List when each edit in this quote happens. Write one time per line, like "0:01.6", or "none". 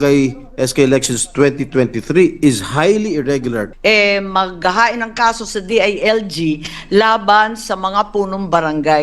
0:03.6